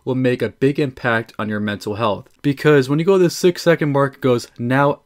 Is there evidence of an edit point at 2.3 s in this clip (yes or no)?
yes